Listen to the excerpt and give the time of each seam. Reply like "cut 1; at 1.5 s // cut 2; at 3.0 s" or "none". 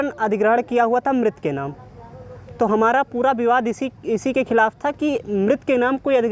none